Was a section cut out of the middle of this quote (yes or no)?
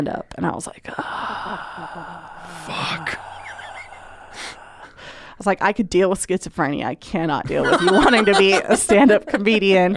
no